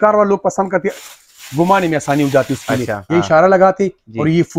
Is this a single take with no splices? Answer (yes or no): no